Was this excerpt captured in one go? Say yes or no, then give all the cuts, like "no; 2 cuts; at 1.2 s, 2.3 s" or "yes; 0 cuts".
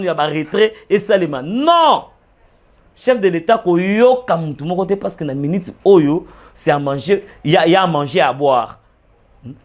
yes; 0 cuts